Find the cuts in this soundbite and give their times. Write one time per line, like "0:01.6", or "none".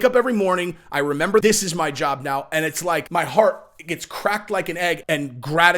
0:01.4
0:03.1
0:05.0